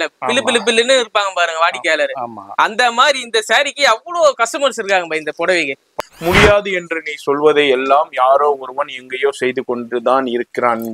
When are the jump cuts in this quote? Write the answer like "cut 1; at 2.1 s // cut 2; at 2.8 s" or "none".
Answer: cut 1; at 5.9 s